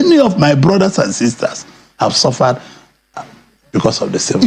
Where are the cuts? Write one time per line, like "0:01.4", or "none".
none